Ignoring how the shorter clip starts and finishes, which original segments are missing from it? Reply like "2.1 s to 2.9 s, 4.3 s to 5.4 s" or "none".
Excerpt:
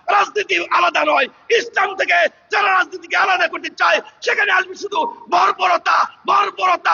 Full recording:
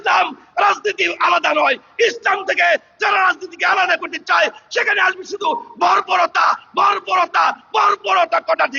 none

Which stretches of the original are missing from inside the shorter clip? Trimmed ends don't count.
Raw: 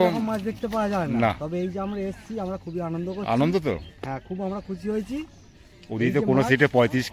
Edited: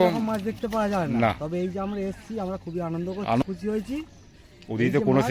3.4 s to 4.6 s

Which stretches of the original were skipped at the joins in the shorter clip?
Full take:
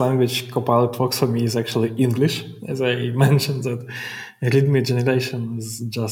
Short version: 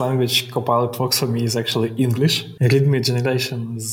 2.5 s to 4.3 s

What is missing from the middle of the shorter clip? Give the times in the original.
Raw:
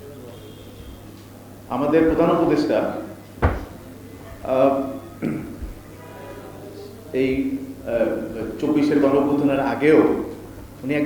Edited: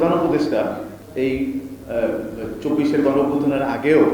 3.1 s to 6.9 s

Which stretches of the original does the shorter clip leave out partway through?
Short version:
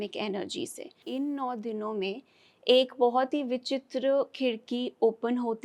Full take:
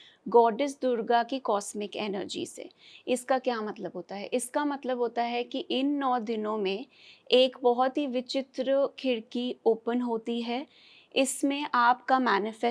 2.8 s to 5.6 s

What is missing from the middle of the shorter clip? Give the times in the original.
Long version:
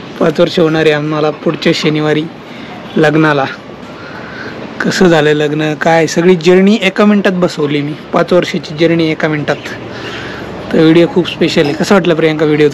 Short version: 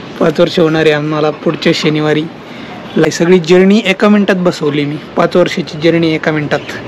3.1 s to 6.0 s

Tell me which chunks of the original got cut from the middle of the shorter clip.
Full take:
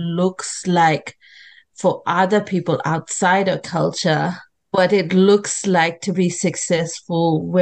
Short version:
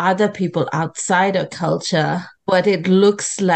4.4 s to 4.6 s

